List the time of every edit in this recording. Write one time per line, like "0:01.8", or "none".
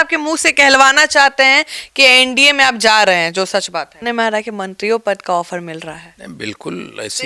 0:03.9